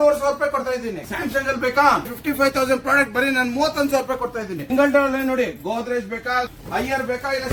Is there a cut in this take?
yes; 4 cuts; at 1.1 s, 2.2 s, 4.7 s, 6.5 s

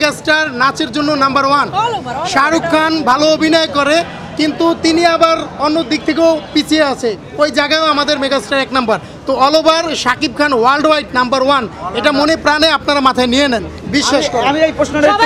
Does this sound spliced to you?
no; 0 cuts

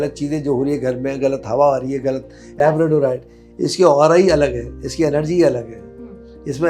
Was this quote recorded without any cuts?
no; 1 cut; at 2.6 s

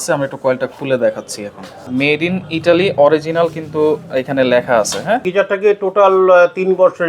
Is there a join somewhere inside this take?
yes; 2 cuts; at 1.8 s, 5.3 s

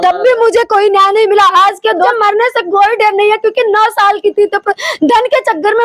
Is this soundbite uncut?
no; 1 cut; at 2.1 s

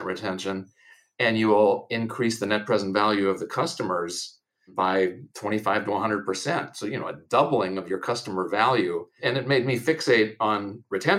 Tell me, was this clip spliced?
yes; 1 cut; at 9.1 s

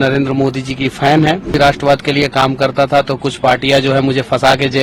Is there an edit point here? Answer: yes; 1 cut; at 1.5 s

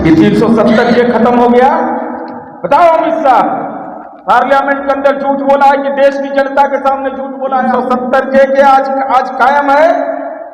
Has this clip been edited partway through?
yes; 1 cut; at 7.7 s

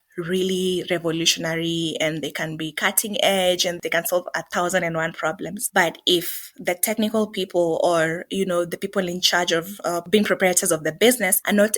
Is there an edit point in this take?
yes; 1 cut; at 3.8 s

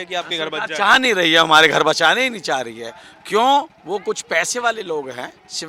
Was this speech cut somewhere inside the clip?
no; 0 cuts

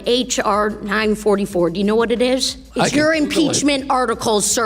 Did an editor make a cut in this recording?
yes; 1 cut; at 2.6 s

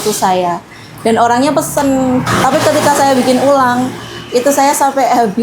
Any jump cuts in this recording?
yes; 1 cut; at 2.2 s

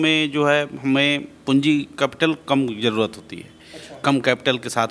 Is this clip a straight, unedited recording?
yes; 0 cuts

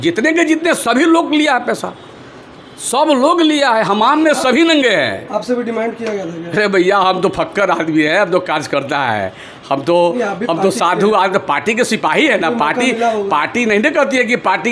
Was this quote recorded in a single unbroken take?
yes; 0 cuts

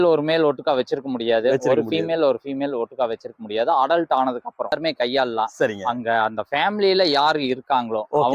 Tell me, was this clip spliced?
yes; 1 cut; at 4.7 s

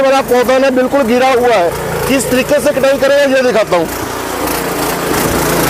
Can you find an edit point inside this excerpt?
no; 0 cuts

